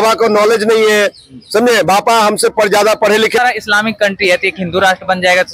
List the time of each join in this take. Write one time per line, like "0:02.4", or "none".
0:03.4